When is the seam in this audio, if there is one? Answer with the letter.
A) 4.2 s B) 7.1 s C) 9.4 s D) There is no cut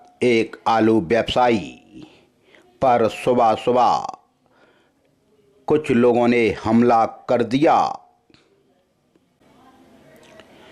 C